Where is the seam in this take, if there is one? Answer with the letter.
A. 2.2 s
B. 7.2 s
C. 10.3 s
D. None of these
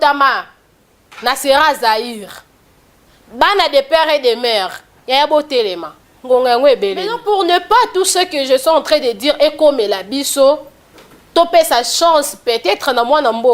B